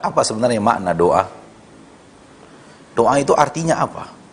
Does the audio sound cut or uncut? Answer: uncut